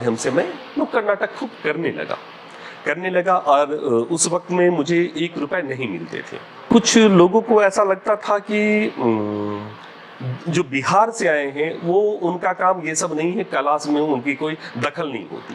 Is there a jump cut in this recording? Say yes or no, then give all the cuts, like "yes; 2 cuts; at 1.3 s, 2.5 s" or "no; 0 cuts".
yes; 1 cut; at 6.7 s